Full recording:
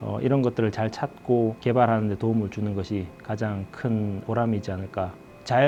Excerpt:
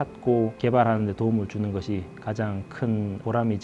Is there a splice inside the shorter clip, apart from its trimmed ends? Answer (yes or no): no